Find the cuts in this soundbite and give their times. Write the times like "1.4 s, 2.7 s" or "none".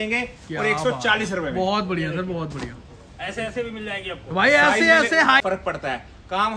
5.4 s